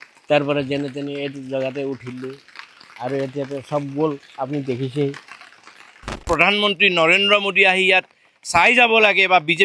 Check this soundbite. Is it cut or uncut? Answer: cut